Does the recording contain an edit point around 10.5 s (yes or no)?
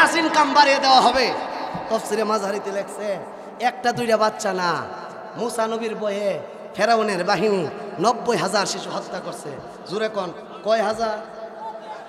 no